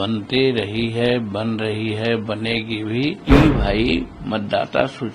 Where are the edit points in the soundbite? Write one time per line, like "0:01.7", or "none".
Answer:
0:03.2